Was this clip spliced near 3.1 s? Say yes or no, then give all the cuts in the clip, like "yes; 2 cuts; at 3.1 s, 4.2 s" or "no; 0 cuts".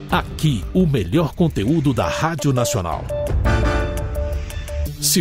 no; 0 cuts